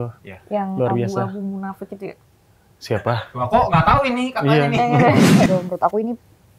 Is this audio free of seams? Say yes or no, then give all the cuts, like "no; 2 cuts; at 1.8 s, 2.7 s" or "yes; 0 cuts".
no; 1 cut; at 5.5 s